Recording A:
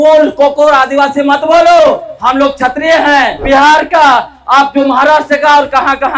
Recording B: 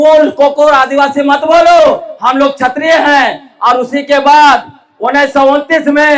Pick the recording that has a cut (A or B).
A